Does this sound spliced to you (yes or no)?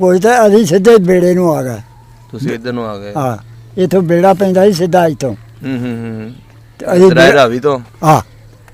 no